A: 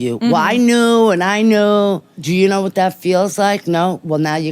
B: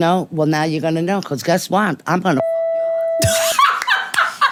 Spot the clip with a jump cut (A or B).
A